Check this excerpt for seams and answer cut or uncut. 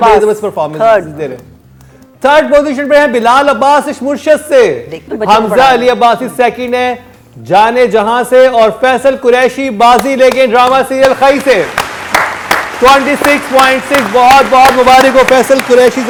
uncut